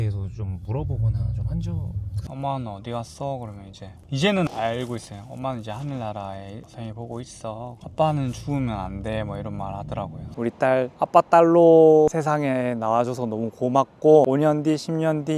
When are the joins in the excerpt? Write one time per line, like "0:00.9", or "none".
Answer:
0:02.1
0:07.8
0:10.2
0:12.1
0:14.3